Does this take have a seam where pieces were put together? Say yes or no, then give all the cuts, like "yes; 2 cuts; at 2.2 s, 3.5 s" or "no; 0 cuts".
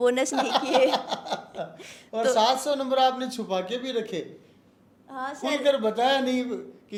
no; 0 cuts